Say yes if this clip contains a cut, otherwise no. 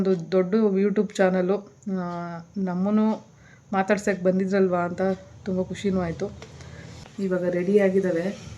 yes